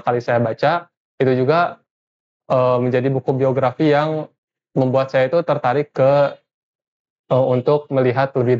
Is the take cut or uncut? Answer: uncut